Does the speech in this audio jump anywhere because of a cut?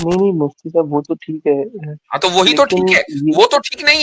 no; 0 cuts

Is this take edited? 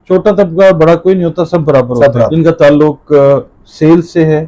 yes; 1 cut; at 2.3 s

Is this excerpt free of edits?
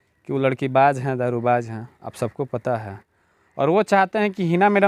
yes; 0 cuts

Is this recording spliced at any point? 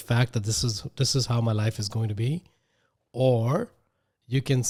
no; 0 cuts

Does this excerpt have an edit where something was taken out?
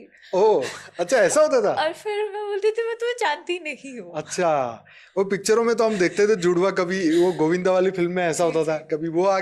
no; 0 cuts

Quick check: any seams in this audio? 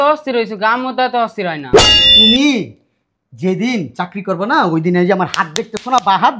yes; 1 cut; at 2.0 s

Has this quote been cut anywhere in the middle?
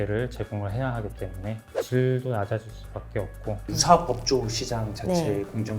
yes; 1 cut; at 3.6 s

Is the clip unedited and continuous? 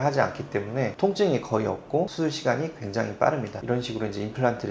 no; 1 cut; at 3.6 s

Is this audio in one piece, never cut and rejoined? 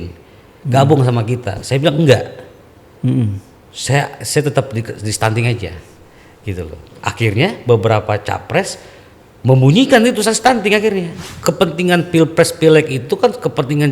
no; 1 cut; at 11.1 s

